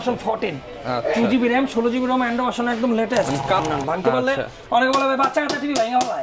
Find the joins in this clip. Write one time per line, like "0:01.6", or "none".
0:03.6